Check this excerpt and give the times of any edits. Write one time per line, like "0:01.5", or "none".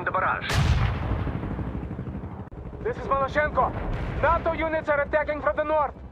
0:02.5